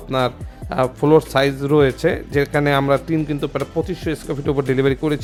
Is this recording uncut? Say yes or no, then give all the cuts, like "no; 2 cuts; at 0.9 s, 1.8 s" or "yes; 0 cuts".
yes; 0 cuts